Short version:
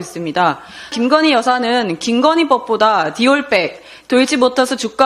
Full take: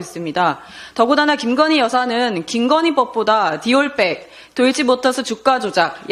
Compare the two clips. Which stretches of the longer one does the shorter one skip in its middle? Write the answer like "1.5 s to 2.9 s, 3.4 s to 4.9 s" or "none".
0.9 s to 1.4 s

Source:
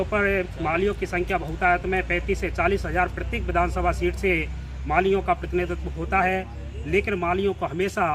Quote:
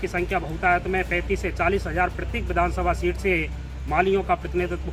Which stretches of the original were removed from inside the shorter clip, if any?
none

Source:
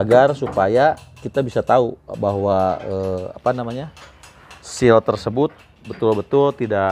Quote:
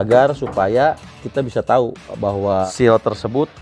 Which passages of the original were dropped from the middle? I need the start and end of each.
2.7 s to 4.7 s

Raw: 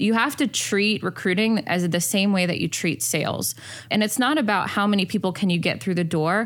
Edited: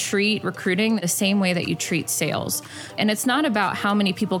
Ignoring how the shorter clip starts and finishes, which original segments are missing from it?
1.6 s to 2.0 s

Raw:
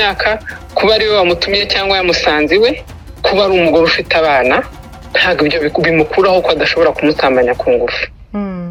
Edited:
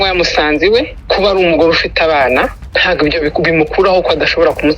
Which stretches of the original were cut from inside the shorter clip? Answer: 2.9 s to 3.1 s, 4.8 s to 5.0 s

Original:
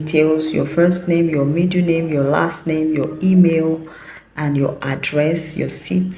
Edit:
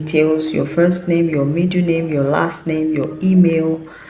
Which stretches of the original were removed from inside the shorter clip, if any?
none

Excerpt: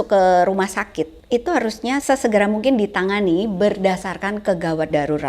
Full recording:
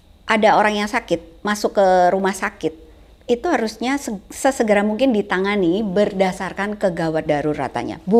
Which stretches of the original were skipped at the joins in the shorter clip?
2.8 s to 3.1 s, 4.0 s to 4.4 s

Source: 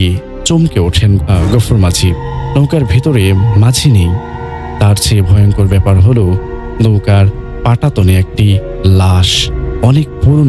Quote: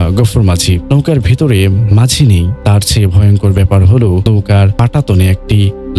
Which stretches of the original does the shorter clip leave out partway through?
2.2 s to 2.5 s, 4.2 s to 4.7 s, 6.6 s to 7.3 s

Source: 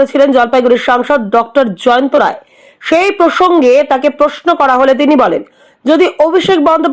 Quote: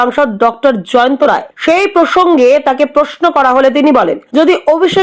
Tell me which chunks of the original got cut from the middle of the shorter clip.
2.4 s to 2.7 s, 5.4 s to 5.7 s

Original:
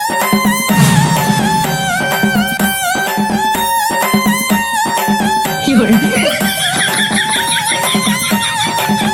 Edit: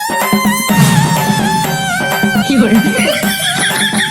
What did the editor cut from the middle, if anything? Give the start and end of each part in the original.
2.5 s to 5.6 s

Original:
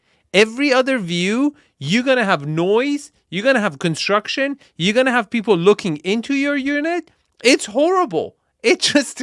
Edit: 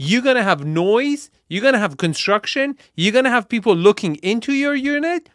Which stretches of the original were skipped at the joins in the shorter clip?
none

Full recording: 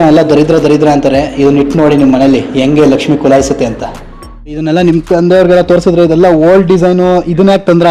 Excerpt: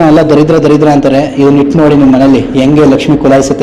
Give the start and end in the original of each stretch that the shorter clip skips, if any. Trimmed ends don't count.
none

